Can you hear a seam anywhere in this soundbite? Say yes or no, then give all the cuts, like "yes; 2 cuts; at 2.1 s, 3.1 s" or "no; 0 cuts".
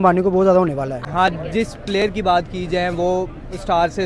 yes; 1 cut; at 1.1 s